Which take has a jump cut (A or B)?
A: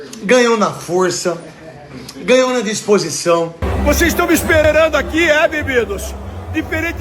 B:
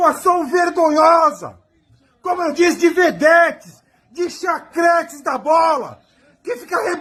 A